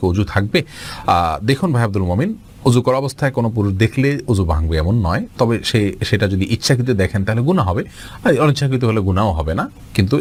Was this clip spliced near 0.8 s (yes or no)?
no